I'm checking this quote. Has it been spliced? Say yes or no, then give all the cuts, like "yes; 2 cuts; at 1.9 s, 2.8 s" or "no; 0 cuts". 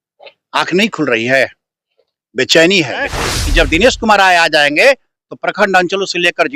yes; 1 cut; at 3.1 s